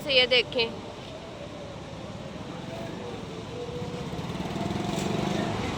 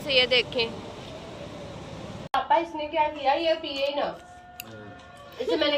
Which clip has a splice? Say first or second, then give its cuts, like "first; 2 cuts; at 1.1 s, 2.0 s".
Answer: second; 1 cut; at 2.3 s